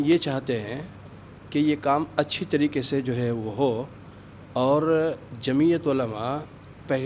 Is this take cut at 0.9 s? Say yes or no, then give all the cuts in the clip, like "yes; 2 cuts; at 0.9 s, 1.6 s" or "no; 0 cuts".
no; 0 cuts